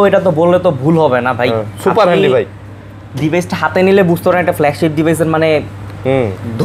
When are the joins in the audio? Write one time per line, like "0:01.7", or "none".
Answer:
none